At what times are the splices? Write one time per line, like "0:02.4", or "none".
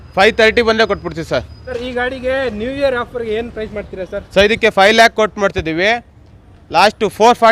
0:01.8